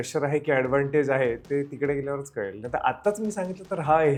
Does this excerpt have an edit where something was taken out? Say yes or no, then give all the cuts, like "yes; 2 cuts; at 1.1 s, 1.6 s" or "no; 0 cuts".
no; 0 cuts